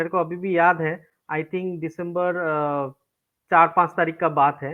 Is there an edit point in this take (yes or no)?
no